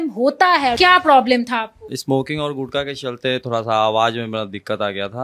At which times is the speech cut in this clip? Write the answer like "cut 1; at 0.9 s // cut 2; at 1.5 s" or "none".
cut 1; at 0.8 s // cut 2; at 1.9 s